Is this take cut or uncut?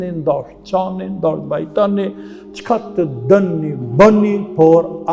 uncut